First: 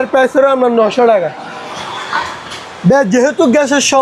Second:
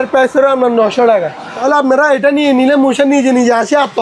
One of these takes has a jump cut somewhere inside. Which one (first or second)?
second